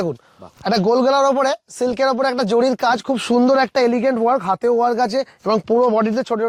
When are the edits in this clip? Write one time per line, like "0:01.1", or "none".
none

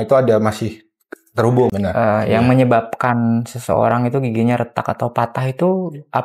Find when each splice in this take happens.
0:01.7

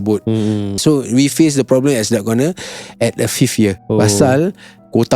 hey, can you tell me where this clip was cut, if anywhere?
0:00.8
0:03.8

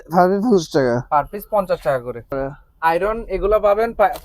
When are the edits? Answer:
0:02.3

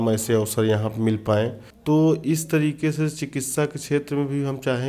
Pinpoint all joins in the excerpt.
0:01.7

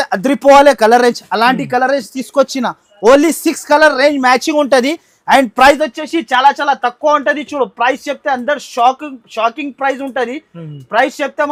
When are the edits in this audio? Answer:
none

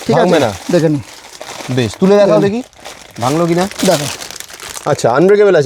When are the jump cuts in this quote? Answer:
none

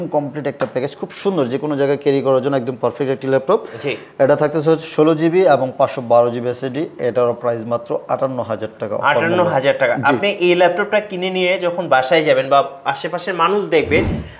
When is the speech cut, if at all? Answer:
none

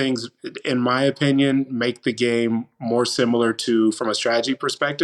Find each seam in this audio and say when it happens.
none

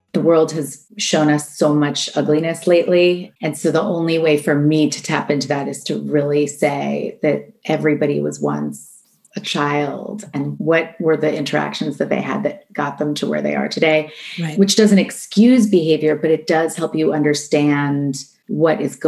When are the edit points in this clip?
none

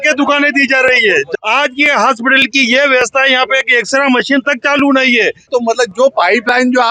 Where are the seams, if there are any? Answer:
0:01.3
0:05.5

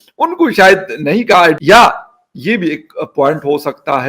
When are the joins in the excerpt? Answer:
0:01.6

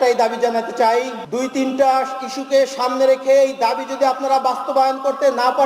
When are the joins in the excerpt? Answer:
0:01.2

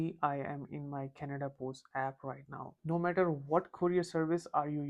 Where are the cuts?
0:02.7

